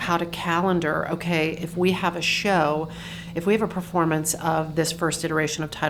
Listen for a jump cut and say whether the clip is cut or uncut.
uncut